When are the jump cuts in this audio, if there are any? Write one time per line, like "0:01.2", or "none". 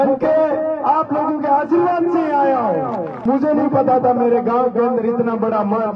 0:03.1